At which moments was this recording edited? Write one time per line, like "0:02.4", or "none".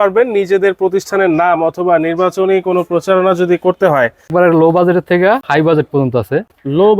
0:04.3
0:05.4

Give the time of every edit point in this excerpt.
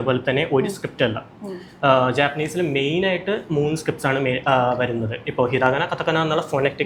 none

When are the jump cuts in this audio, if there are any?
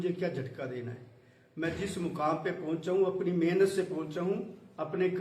0:03.4

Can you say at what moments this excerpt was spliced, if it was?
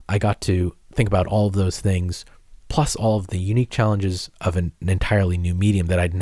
none

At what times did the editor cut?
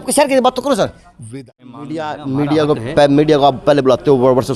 0:01.2

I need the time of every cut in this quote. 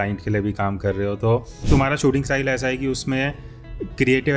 0:01.5

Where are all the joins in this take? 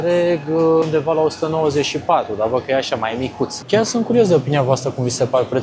0:00.8
0:03.6

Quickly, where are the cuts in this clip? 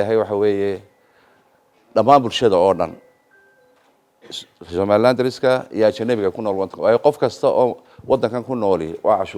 none

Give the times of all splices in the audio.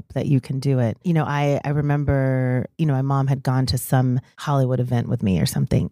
0:01.0
0:02.7
0:04.3

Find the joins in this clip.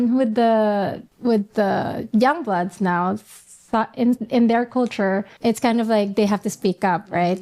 0:01.0
0:05.3

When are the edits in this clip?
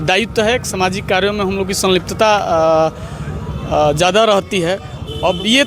none

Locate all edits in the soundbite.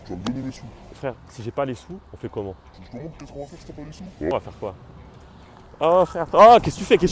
0:01.0
0:02.7

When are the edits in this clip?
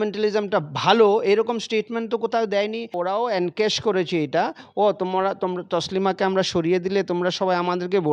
0:03.0

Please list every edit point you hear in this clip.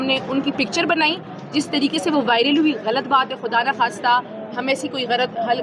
none

